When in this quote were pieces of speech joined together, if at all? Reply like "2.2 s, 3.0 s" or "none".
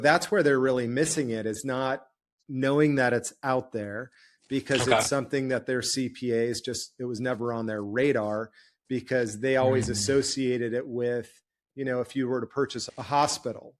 none